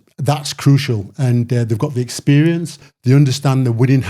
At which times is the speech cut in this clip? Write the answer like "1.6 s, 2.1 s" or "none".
2.9 s